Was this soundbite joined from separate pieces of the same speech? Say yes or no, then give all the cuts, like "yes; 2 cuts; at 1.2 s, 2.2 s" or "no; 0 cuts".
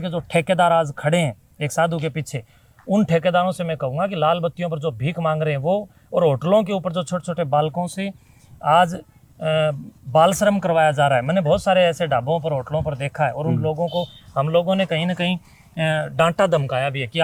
no; 0 cuts